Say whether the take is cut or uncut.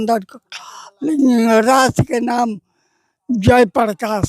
uncut